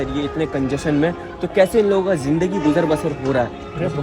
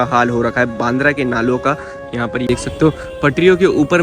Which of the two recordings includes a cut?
second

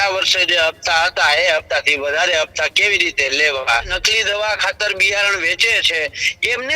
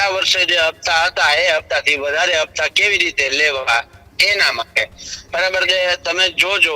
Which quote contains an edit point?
first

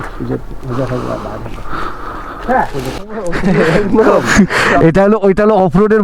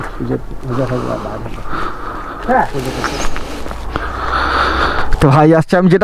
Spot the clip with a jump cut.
first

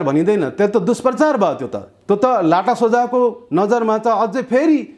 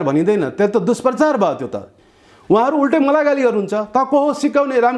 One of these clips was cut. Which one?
second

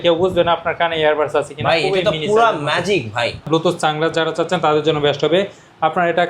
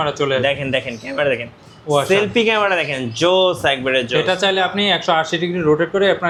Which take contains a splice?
first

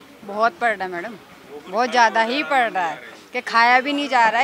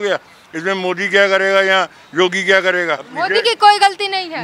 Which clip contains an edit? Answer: second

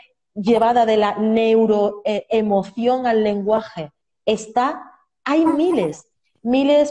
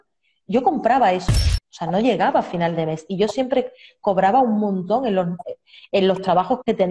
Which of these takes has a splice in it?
second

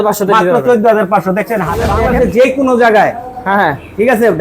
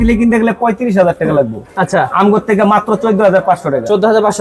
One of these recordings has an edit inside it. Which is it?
first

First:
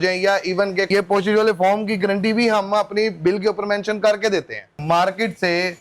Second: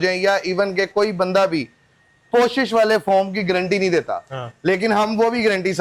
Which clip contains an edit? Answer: first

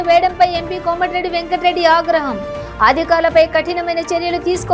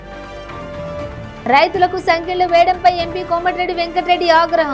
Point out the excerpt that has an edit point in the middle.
second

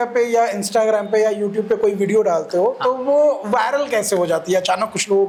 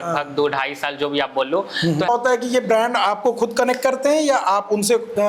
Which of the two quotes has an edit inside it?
second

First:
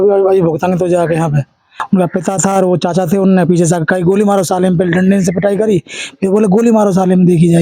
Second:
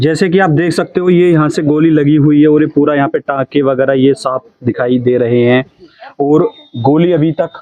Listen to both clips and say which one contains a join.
first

